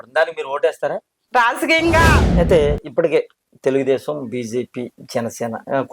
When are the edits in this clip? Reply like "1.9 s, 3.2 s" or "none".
2.2 s